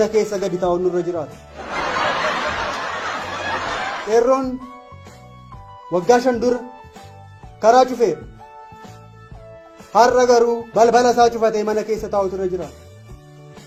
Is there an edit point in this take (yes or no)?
no